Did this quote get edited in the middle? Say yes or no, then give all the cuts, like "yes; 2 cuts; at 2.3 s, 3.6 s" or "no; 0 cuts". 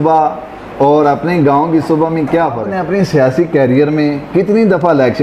yes; 1 cut; at 2.7 s